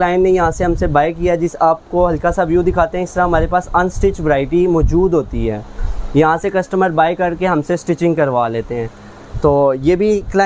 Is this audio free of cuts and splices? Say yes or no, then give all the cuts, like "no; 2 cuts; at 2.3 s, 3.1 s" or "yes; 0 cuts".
yes; 0 cuts